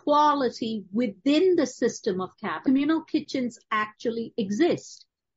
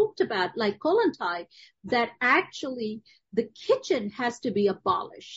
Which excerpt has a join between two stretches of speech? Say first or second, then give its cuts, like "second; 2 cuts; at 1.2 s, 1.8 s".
first; 1 cut; at 2.6 s